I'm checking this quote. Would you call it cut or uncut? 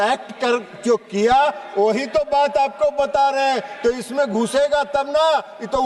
uncut